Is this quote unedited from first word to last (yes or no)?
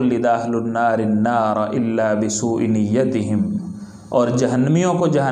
yes